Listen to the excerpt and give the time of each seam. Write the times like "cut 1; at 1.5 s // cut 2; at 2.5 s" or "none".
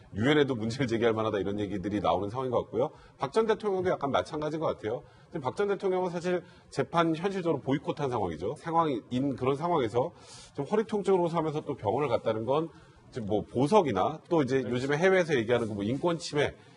none